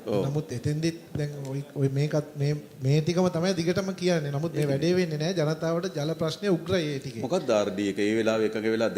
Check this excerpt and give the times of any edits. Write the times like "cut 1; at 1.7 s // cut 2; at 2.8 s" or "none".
none